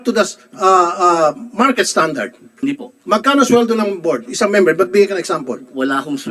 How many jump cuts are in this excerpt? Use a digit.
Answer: 1